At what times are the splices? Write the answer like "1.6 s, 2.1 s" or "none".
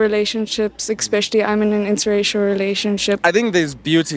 3.2 s